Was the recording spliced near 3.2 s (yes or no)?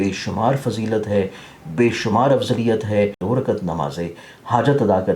yes